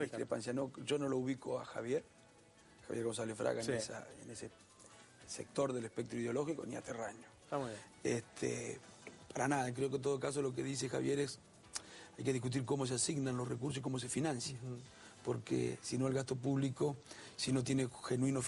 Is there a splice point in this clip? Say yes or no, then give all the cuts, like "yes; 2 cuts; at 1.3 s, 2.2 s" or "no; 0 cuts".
no; 0 cuts